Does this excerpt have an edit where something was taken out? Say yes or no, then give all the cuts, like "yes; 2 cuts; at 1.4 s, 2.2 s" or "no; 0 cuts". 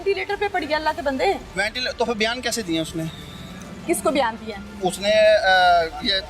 no; 0 cuts